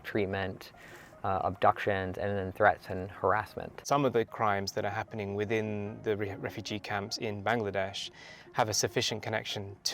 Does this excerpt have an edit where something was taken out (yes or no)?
yes